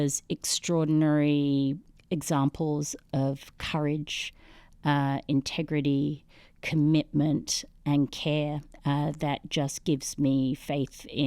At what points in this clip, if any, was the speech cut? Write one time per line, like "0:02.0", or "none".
0:01.9